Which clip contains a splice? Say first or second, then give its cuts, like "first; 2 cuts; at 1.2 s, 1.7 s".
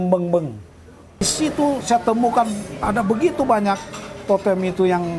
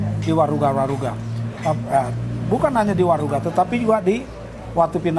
first; 1 cut; at 1.2 s